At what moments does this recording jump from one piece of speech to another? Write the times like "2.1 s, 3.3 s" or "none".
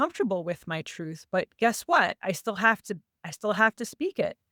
none